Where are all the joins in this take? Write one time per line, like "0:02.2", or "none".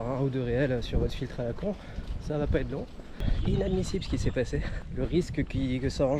0:03.2
0:04.8